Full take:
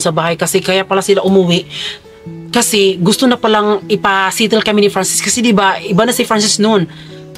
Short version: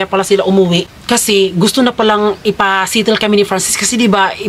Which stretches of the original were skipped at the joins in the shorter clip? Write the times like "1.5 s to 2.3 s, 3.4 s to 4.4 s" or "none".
1.7 s to 2.4 s